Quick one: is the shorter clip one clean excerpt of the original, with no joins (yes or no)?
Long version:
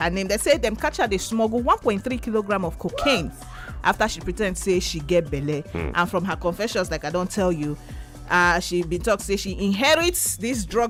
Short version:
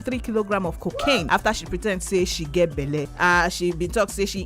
no